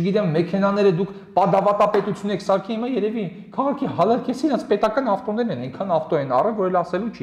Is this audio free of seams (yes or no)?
yes